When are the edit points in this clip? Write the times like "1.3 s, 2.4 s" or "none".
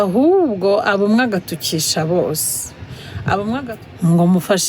3.6 s